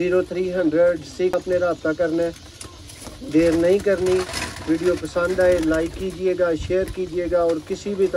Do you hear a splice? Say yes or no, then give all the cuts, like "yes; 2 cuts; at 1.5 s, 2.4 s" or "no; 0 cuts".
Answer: yes; 1 cut; at 1.4 s